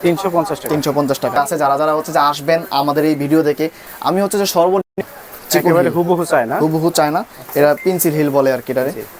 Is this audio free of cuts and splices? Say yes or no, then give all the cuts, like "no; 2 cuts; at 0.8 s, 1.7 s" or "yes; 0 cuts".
yes; 0 cuts